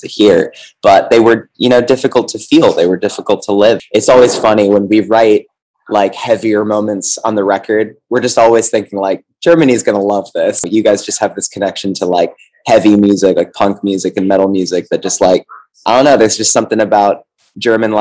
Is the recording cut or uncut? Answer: cut